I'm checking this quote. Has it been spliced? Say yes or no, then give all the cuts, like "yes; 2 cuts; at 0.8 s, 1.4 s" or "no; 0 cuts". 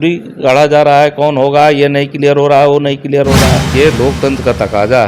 yes; 1 cut; at 3.7 s